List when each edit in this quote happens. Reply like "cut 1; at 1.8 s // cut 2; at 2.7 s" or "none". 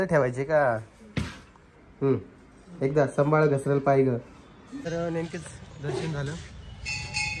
cut 1; at 4.7 s